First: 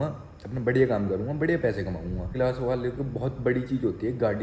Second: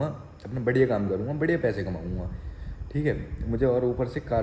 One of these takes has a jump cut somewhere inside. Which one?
first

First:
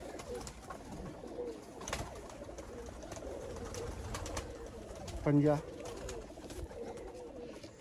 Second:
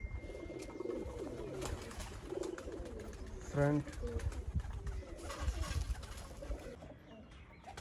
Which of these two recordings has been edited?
second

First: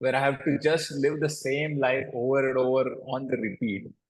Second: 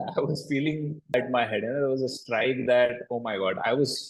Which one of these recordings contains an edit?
second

